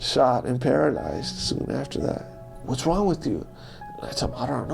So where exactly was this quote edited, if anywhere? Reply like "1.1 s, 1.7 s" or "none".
2.5 s

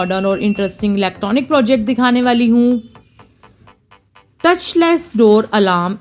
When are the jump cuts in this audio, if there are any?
none

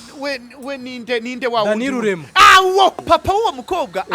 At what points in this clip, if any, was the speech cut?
3.0 s

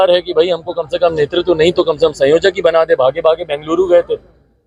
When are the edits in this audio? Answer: none

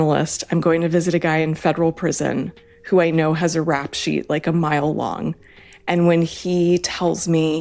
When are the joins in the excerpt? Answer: none

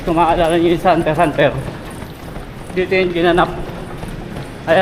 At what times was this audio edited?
none

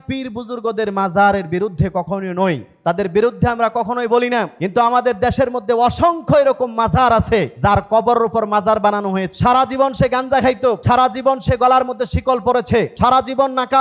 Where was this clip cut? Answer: 2.7 s, 4.6 s, 7.5 s, 9.3 s, 10.8 s, 12.9 s

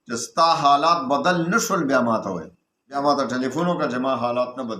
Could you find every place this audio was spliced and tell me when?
3.0 s

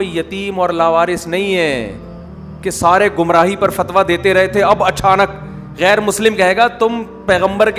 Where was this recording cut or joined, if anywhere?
none

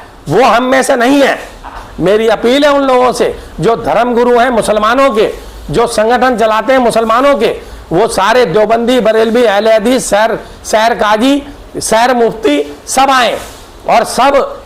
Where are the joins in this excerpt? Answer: 1.8 s

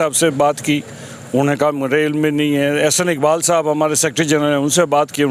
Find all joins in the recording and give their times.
none

